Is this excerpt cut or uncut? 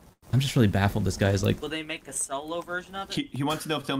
uncut